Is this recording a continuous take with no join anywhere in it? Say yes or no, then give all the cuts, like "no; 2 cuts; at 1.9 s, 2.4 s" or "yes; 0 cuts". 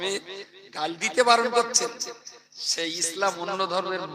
yes; 0 cuts